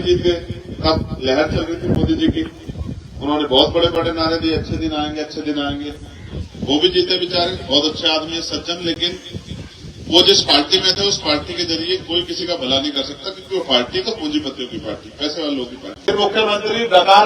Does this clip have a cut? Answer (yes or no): yes